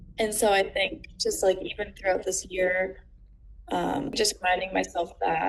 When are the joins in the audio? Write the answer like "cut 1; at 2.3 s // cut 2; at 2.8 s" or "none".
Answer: cut 1; at 4.1 s